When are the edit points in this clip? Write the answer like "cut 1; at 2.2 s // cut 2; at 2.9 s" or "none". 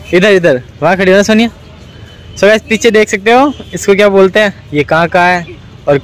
none